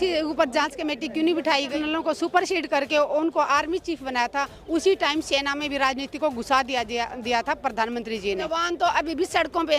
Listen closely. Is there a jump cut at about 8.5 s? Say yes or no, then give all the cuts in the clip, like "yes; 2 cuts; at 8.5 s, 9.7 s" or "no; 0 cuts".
yes; 2 cuts; at 1.7 s, 8.5 s